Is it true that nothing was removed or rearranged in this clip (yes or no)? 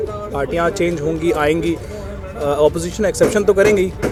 yes